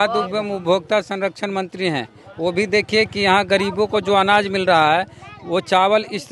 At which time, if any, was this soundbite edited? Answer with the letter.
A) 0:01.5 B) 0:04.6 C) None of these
C